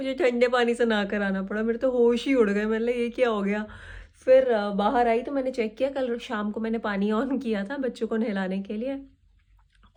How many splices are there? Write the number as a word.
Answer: zero